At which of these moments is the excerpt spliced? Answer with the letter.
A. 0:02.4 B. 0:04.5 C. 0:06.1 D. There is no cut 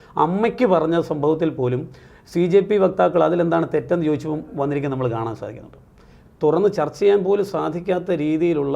C